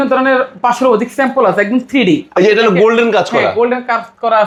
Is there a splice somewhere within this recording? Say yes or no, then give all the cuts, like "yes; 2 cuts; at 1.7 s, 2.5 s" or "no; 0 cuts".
no; 0 cuts